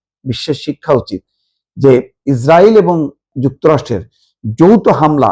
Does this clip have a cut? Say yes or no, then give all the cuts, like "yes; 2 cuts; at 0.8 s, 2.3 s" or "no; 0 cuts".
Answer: yes; 2 cuts; at 2.1 s, 3.3 s